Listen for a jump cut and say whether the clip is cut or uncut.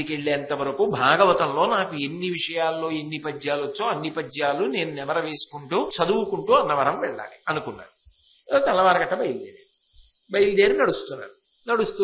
cut